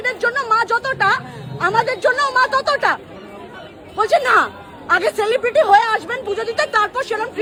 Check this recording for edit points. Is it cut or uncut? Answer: uncut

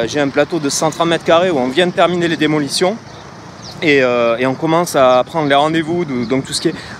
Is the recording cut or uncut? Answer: uncut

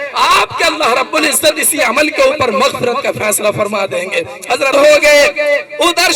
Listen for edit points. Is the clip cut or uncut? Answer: cut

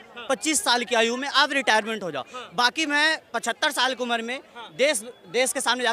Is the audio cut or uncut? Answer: uncut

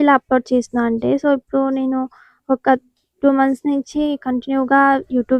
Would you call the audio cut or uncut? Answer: uncut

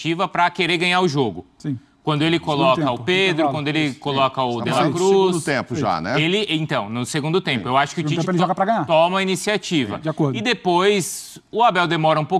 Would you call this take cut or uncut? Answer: uncut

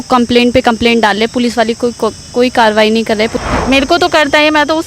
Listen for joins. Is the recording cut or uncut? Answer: cut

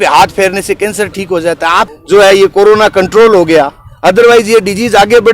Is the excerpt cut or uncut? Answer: cut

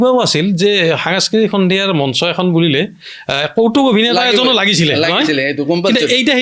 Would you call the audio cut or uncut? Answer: uncut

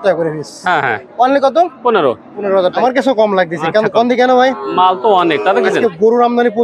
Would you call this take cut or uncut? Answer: cut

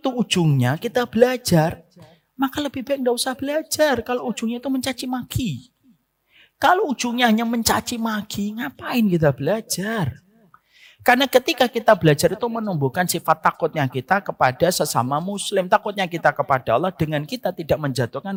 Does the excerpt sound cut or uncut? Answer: uncut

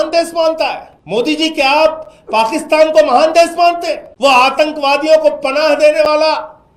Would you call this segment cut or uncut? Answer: cut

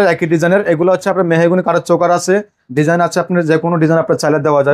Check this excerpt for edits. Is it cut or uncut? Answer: uncut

